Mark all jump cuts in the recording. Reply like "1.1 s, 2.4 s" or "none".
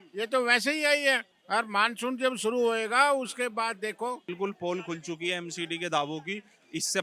1.3 s, 4.3 s